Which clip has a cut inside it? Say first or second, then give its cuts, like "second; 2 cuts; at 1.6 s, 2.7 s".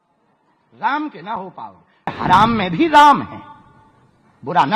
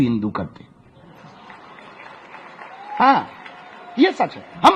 first; 1 cut; at 2.1 s